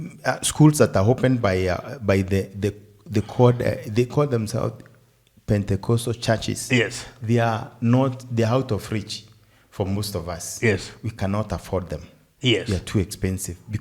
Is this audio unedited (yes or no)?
yes